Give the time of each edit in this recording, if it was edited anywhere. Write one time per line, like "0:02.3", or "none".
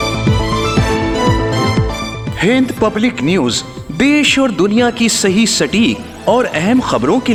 none